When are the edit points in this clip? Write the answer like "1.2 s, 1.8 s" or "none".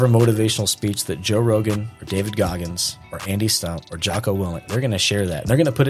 4.7 s